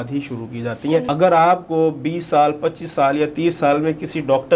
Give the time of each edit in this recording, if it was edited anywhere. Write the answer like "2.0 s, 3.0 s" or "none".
1.0 s

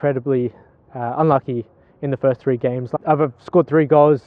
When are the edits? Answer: 2.9 s

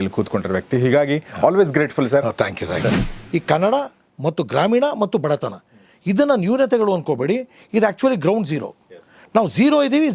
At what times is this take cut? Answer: 3.1 s

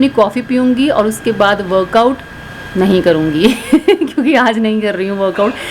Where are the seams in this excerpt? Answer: none

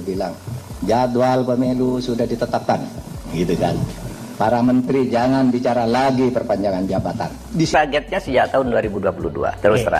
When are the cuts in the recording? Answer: 7.7 s

